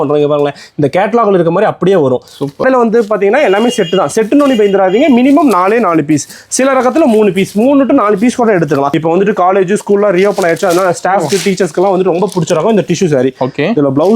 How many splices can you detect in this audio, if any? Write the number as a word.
two